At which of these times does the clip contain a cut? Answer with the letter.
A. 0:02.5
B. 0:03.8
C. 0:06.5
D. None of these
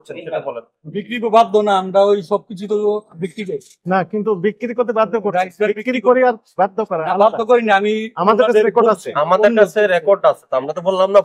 B